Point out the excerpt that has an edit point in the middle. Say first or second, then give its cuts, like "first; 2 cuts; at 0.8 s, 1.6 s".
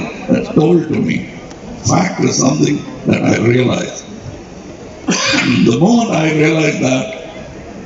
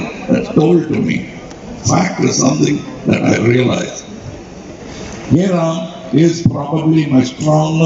second; 1 cut; at 4.9 s